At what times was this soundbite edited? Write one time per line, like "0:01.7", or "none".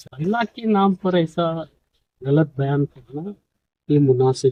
none